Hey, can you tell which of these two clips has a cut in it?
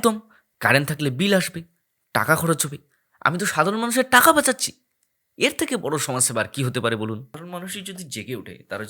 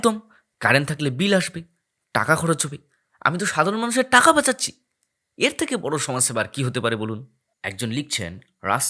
first; 1 cut; at 7.4 s

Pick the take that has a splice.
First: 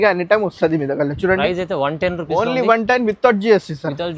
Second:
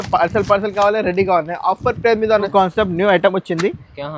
second; 1 cut; at 2.5 s

